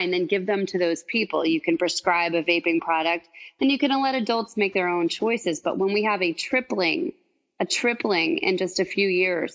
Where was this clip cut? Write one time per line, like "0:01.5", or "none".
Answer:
none